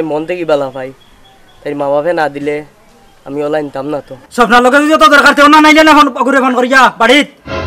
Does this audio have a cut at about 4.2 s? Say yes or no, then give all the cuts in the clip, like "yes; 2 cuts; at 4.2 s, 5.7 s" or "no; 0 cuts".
yes; 1 cut; at 4.2 s